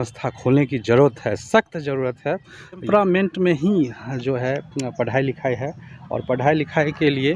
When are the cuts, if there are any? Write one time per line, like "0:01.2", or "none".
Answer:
0:02.9